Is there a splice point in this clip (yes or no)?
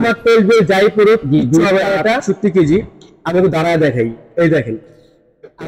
yes